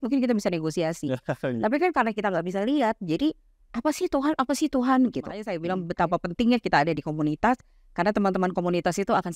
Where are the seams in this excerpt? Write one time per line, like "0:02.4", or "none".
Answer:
0:05.6